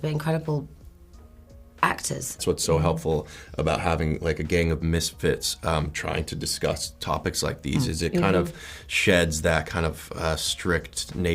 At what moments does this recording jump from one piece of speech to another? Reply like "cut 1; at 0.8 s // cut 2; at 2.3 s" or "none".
cut 1; at 2.4 s